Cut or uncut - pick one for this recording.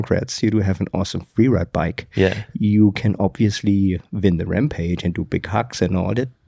uncut